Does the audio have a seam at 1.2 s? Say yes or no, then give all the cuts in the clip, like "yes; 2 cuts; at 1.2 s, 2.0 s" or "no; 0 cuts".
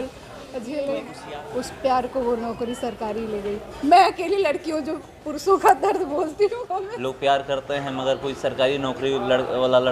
yes; 2 cuts; at 1.2 s, 6.9 s